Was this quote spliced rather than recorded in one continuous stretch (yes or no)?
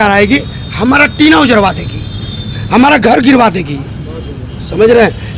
no